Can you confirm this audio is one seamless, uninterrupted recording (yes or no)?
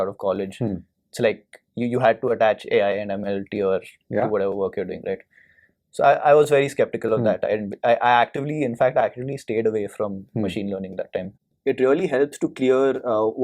no